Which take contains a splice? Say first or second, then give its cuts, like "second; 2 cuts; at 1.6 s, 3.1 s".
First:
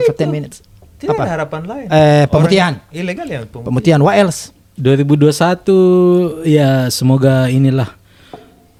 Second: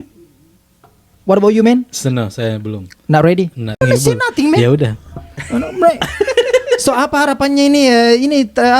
second; 1 cut; at 3.8 s